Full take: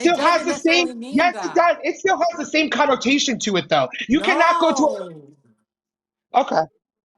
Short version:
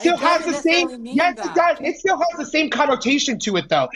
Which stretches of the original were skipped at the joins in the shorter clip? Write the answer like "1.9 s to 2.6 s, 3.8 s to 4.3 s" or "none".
none